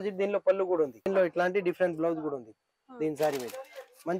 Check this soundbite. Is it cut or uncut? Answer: cut